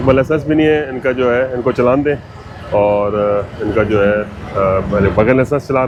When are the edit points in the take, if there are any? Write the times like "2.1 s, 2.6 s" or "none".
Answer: none

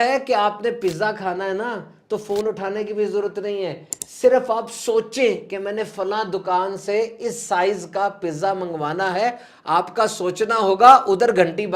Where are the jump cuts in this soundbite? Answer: none

